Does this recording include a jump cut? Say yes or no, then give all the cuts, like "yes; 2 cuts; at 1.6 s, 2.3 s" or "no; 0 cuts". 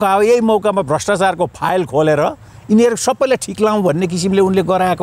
no; 0 cuts